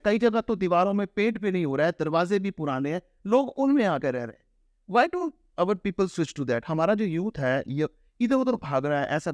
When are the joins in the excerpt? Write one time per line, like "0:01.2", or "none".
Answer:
none